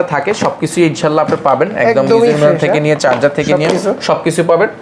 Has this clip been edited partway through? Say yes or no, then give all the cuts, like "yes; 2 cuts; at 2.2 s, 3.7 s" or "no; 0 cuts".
no; 0 cuts